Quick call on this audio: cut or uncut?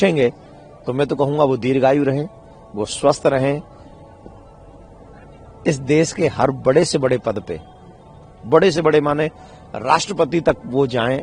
uncut